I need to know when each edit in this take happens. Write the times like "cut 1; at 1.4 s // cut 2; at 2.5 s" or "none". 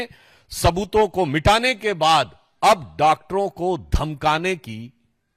none